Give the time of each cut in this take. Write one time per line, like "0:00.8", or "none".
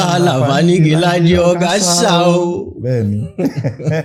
none

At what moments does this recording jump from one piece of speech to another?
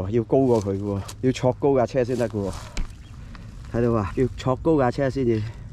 0:01.1
0:04.1

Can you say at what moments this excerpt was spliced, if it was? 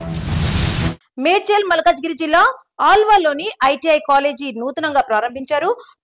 0:01.0

